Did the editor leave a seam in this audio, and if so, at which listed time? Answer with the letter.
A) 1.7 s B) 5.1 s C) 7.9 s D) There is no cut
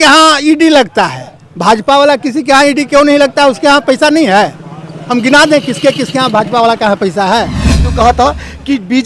C